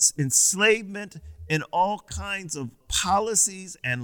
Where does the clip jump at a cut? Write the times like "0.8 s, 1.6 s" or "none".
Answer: 2.9 s